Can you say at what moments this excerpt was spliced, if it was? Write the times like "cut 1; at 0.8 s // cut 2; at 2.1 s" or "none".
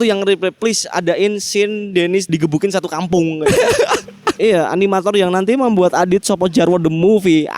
cut 1; at 2.3 s // cut 2; at 4.4 s